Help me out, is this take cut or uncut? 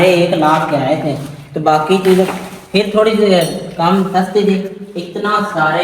uncut